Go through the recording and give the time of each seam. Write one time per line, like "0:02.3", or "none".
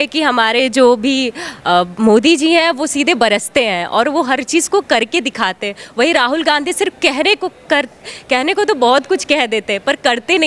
none